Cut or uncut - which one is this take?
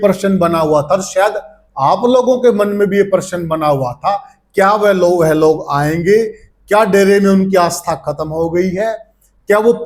uncut